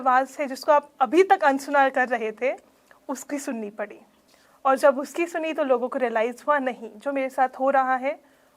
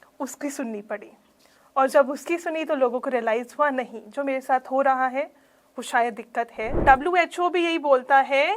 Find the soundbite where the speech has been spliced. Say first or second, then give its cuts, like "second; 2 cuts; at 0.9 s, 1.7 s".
second; 1 cut; at 6.8 s